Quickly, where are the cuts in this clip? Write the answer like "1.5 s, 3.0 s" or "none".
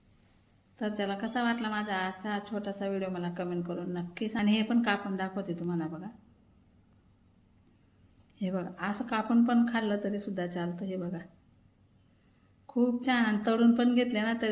4.4 s